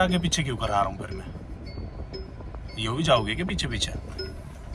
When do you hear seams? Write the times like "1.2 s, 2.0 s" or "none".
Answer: none